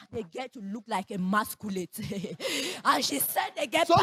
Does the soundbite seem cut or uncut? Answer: uncut